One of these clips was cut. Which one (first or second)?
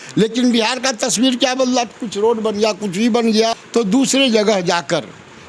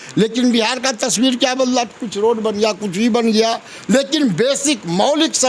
first